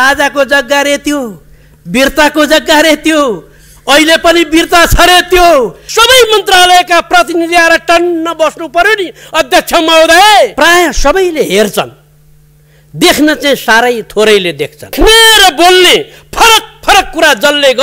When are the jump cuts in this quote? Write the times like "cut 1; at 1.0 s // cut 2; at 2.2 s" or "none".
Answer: cut 1; at 5.8 s // cut 2; at 10.5 s // cut 3; at 14.9 s